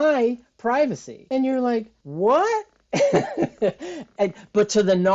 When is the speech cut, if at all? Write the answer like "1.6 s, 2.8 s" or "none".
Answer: 1.6 s